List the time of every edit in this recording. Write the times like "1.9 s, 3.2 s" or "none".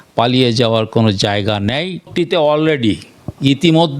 2.0 s